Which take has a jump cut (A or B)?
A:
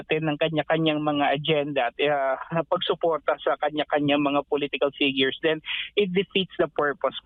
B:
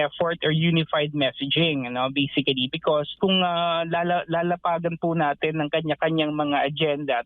B